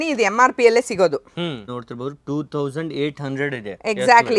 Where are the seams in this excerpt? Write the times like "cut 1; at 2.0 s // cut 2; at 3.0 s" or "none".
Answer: cut 1; at 1.8 s